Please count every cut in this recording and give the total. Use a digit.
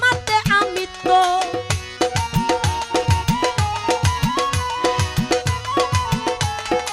0